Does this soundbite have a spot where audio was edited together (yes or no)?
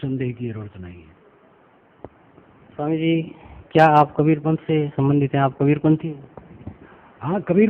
yes